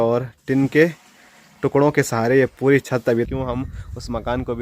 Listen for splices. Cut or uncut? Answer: cut